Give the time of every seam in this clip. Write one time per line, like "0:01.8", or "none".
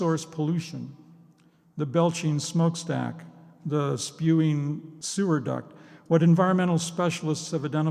0:04.9